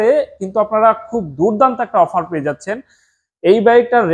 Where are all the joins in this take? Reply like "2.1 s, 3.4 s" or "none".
none